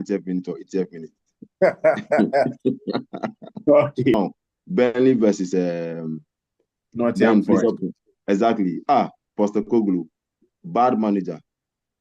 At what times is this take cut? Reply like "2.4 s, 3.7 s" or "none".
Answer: 4.1 s